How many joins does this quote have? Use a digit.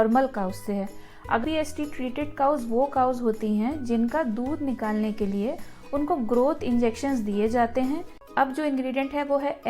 2